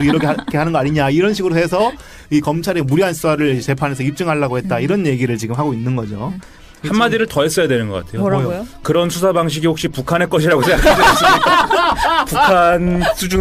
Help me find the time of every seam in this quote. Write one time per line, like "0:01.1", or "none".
none